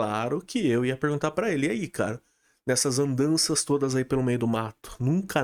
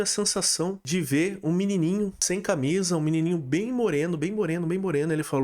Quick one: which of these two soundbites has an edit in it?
second; 2 cuts; at 0.8 s, 2.2 s

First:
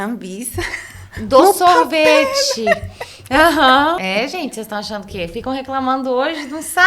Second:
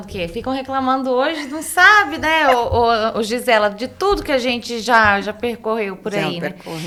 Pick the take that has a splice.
first; 1 cut; at 4.0 s

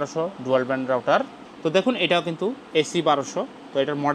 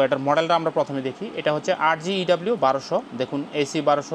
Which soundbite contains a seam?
first; 1 cut; at 1.4 s

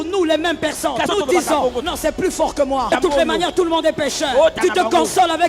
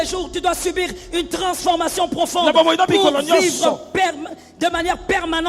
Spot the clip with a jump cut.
first; 4 cuts; at 1.1 s, 1.8 s, 2.9 s, 4.5 s

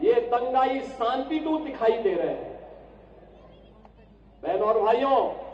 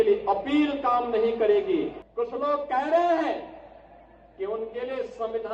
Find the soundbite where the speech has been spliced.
second; 1 cut; at 2.0 s

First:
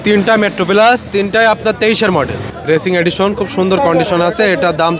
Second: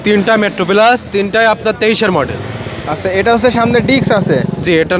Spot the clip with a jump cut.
first; 1 cut; at 2.5 s

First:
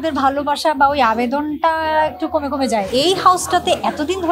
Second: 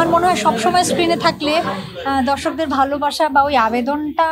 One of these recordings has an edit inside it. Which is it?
first; 1 cut; at 2.9 s

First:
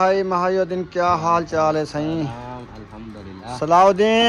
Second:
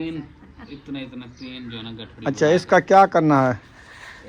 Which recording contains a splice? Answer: first; 1 cut; at 3.4 s

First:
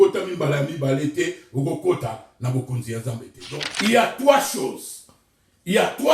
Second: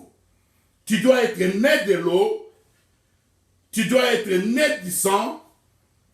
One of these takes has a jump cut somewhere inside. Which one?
first; 1 cut; at 3.3 s

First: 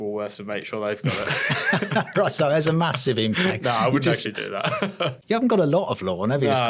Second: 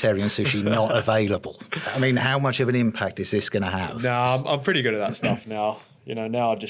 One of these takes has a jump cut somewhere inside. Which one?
first; 1 cut; at 5.2 s

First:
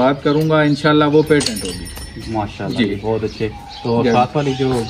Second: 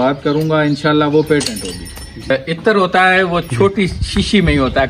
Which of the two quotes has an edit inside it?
second; 1 cut; at 2.3 s

